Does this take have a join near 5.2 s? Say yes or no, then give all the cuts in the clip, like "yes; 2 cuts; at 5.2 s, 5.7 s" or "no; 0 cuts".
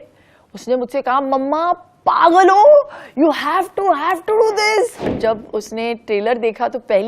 yes; 1 cut; at 5.2 s